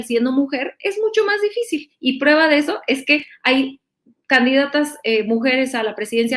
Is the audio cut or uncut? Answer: uncut